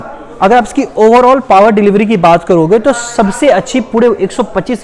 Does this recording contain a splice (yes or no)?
no